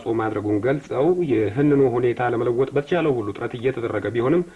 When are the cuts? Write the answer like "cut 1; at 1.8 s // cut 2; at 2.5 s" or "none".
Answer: none